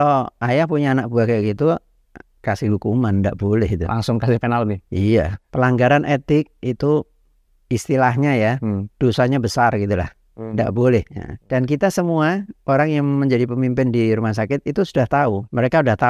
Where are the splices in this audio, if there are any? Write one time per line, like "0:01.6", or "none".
none